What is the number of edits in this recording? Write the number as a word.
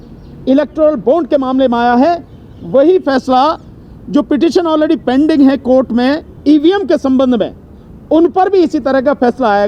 zero